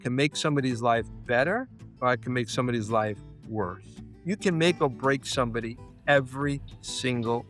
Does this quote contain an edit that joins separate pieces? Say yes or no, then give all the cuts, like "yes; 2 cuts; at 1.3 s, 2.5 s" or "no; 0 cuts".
yes; 2 cuts; at 1.8 s, 4.0 s